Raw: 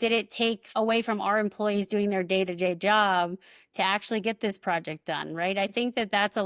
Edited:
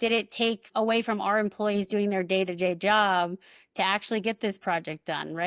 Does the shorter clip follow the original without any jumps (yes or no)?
yes